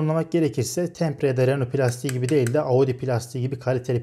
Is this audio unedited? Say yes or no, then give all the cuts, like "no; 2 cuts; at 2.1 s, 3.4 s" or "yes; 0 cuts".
yes; 0 cuts